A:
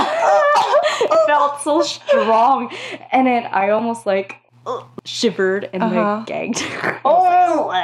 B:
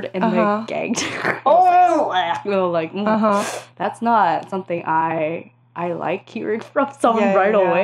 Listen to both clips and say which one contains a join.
A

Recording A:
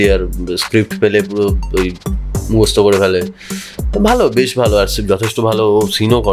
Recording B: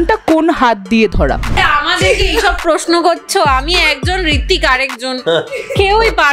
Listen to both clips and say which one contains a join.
B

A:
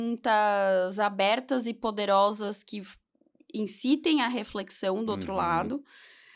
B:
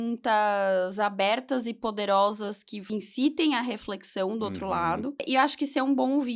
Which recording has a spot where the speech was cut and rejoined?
B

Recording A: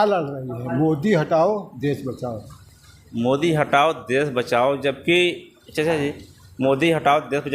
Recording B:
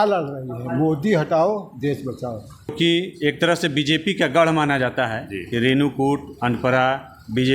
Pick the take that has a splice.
B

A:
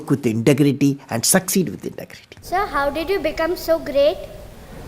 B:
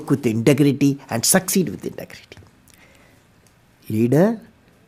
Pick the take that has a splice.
A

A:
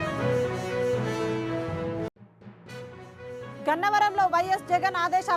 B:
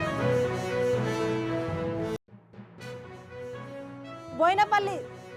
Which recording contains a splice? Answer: A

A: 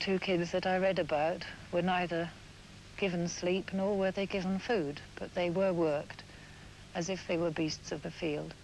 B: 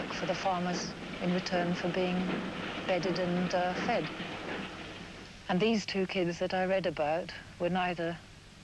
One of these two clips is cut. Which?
A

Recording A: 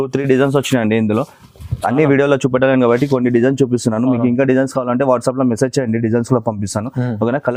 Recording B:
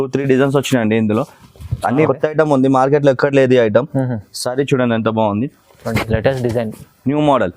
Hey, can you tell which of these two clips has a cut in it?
B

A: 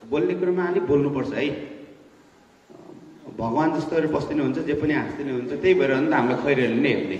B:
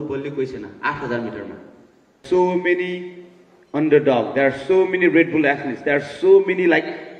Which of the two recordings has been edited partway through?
B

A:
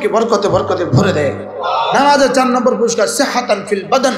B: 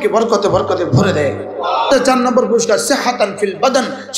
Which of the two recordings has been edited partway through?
B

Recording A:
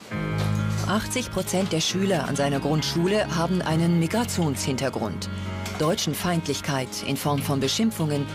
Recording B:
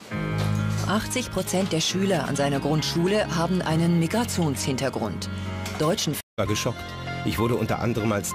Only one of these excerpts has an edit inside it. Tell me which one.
A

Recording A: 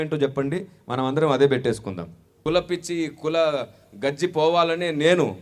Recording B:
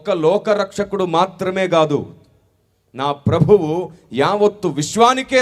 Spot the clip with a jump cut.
A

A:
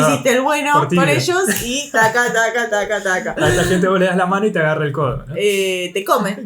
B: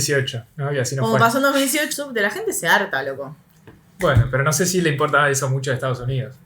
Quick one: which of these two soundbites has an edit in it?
B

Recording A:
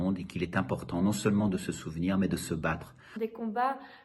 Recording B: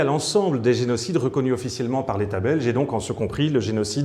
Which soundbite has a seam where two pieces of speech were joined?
A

